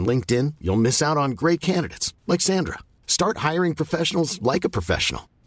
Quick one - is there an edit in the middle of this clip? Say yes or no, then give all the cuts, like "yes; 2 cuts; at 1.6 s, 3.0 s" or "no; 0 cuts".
no; 0 cuts